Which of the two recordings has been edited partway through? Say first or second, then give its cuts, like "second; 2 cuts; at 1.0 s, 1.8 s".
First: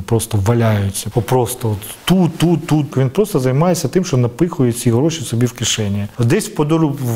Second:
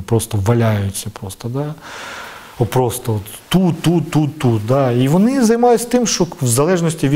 first; 3 cuts; at 1.0 s, 2.9 s, 6.1 s